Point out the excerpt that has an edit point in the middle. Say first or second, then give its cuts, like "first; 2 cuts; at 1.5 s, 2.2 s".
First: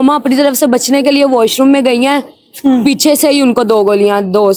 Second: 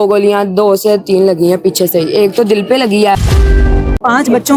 second; 1 cut; at 3.5 s